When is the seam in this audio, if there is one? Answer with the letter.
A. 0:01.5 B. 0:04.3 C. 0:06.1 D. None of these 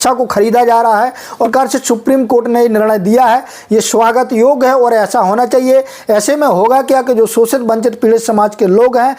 A